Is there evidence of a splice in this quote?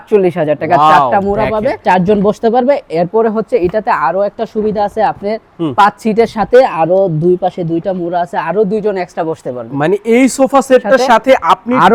no; 0 cuts

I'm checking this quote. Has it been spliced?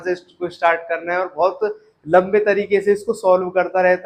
no; 0 cuts

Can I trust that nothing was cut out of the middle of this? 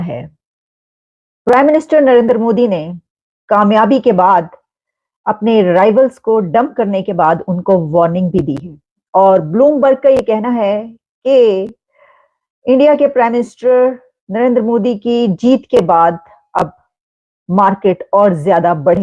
yes; 0 cuts

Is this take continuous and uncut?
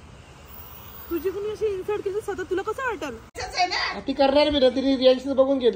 no; 1 cut; at 3.4 s

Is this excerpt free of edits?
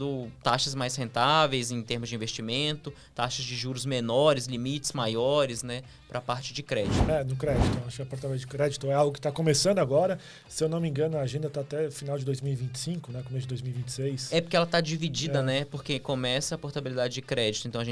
no; 1 cut; at 7.0 s

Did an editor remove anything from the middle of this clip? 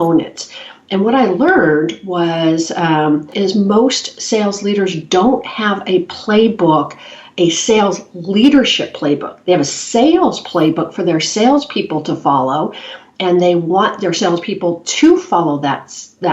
yes; 1 cut; at 3.3 s

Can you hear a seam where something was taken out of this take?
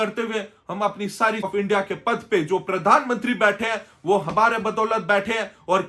yes; 1 cut; at 1.5 s

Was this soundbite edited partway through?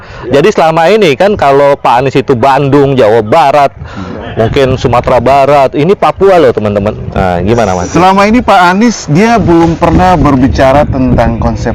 no; 0 cuts

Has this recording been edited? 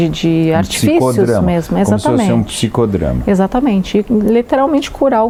no; 0 cuts

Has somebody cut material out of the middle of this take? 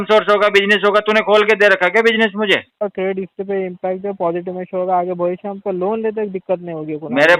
yes; 1 cut; at 2.7 s

